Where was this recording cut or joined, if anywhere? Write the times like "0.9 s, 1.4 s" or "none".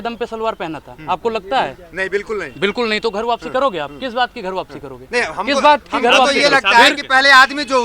none